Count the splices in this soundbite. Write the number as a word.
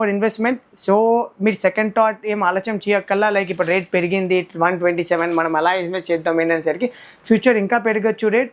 zero